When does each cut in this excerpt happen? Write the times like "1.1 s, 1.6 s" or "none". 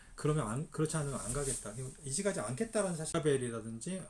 3.1 s